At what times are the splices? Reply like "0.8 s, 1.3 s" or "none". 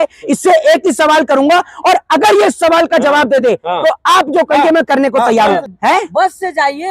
5.7 s